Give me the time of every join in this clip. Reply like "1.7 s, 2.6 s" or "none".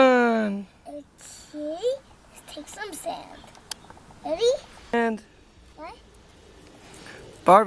4.9 s